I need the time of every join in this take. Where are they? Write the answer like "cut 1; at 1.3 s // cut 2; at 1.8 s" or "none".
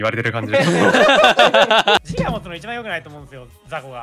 cut 1; at 2.0 s